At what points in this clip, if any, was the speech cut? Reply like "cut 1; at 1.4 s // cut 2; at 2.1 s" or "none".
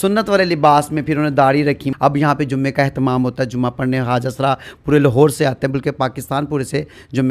cut 1; at 1.9 s